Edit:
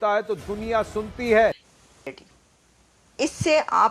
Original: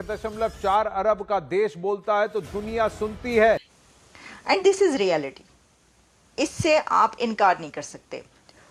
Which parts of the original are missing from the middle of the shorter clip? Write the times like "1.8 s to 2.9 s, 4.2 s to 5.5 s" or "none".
4.3 s to 5.4 s

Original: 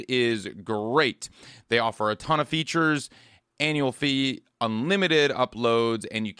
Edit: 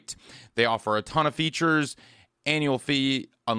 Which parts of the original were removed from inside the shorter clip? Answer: none

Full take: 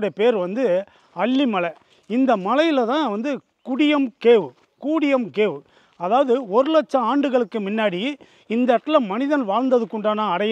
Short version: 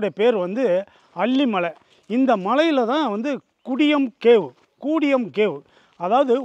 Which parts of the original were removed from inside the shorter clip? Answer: none

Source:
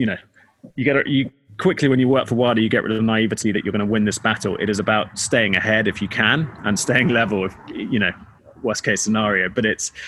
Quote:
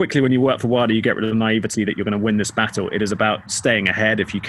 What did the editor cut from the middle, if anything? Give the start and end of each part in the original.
none

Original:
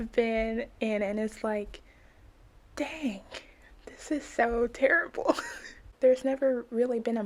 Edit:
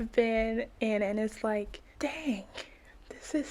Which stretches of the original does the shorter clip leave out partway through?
1.8 s to 2.6 s

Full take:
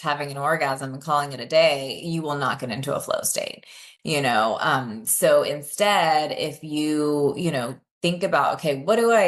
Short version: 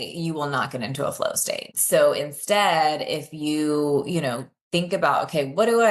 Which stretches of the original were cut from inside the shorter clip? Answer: 3.6 s to 5.0 s

